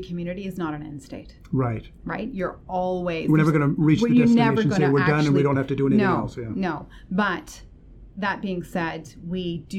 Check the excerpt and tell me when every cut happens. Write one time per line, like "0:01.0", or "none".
none